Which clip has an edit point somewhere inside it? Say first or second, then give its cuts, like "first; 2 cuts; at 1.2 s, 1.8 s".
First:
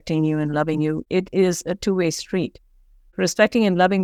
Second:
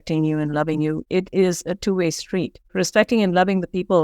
second; 1 cut; at 2.6 s